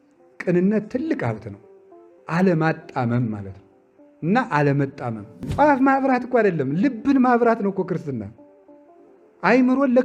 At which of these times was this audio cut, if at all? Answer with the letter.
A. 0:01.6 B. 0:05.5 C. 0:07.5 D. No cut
B